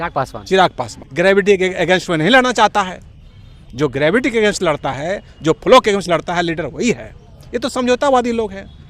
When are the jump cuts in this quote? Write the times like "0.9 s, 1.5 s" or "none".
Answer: 1.0 s